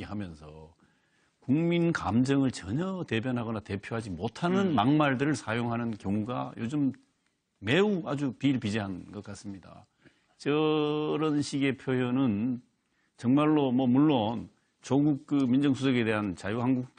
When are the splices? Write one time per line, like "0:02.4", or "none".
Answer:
none